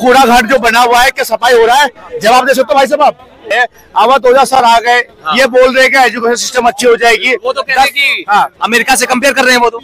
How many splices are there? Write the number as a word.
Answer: one